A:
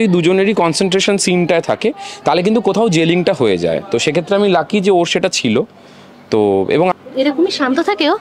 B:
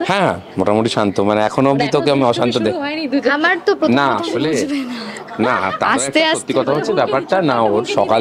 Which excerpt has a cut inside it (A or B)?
A